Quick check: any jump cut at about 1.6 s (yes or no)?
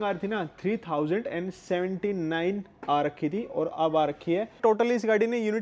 no